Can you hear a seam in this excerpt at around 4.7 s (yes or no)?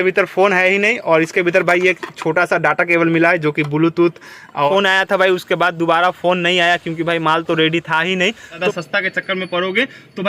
yes